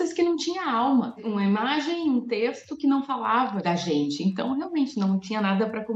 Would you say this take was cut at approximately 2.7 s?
no; 0 cuts

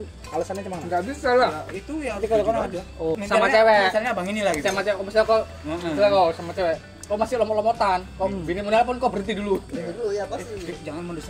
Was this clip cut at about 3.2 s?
yes; 1 cut; at 3.2 s

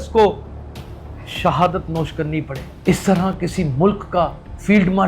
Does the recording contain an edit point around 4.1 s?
no; 1 cut; at 2.6 s

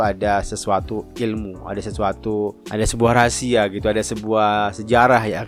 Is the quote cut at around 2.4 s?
no; 0 cuts

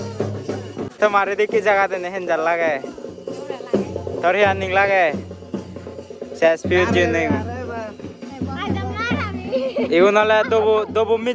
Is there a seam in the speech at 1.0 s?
yes; 1 cut; at 1.0 s

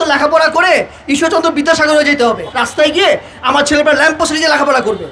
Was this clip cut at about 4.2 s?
no; 1 cut; at 2.6 s

